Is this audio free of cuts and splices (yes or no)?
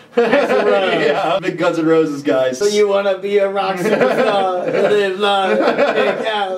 no